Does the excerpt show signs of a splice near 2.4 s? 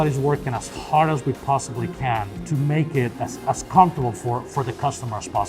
yes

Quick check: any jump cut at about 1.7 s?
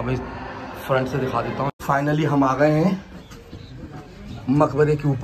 yes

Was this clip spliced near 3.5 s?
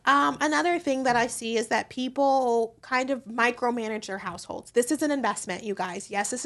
no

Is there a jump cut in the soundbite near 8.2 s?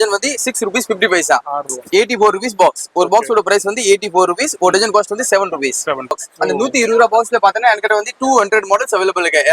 no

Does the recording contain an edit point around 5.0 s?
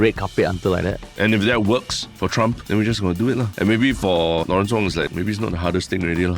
yes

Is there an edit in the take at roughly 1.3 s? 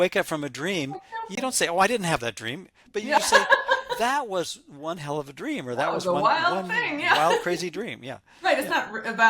yes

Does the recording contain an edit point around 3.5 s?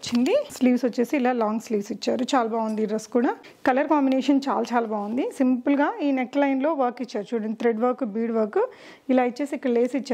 yes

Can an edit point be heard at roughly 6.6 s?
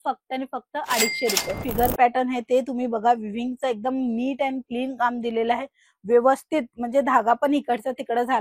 no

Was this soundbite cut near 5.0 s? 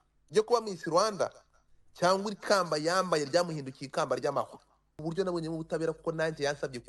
yes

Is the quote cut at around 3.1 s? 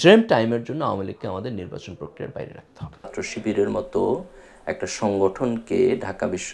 yes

